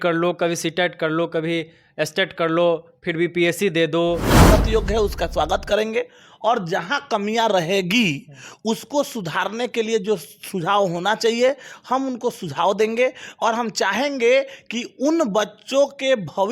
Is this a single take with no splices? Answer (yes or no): no